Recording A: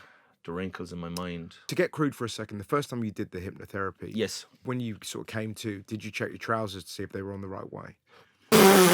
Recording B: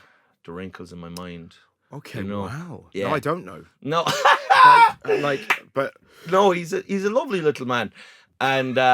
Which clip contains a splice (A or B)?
A